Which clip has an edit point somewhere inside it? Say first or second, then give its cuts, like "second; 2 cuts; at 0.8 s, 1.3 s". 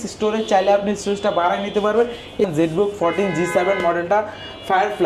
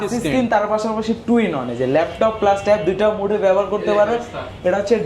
first; 1 cut; at 2.5 s